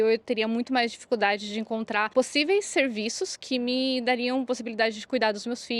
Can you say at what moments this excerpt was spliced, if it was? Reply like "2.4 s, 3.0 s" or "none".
2.1 s